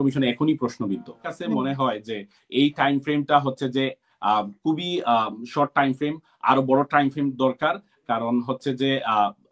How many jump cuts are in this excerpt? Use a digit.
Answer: 1